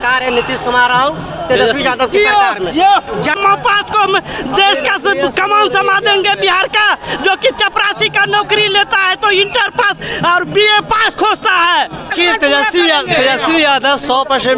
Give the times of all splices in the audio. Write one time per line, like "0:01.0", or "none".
0:03.4
0:12.1